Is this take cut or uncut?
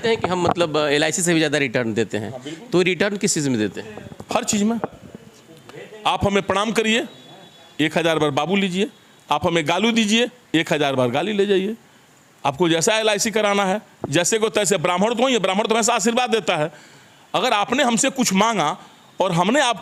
uncut